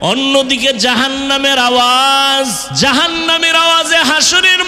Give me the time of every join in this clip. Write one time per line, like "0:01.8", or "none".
0:02.7